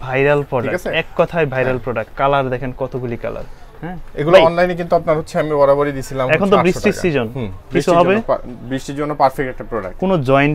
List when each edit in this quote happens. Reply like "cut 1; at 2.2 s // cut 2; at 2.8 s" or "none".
none